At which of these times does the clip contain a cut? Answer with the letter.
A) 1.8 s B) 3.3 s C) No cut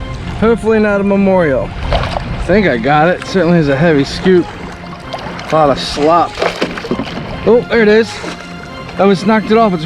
A